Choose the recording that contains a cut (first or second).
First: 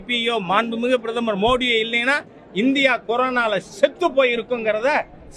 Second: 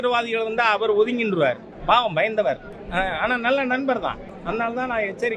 second